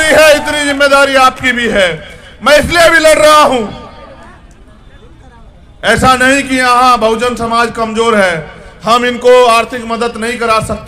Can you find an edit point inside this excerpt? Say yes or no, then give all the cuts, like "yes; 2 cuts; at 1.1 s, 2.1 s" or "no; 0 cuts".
no; 0 cuts